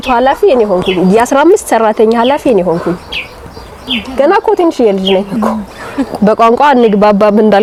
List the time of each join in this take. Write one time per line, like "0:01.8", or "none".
none